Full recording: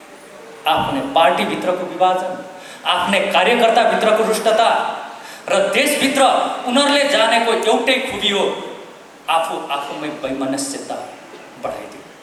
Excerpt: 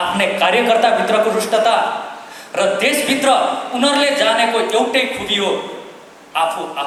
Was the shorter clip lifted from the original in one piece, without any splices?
yes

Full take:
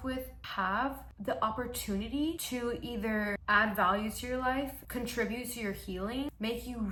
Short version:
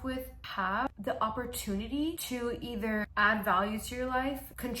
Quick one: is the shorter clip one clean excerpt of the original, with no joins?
no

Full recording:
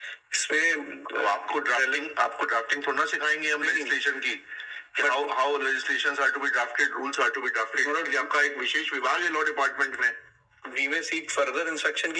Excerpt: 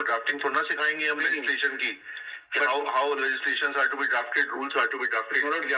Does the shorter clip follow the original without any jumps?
yes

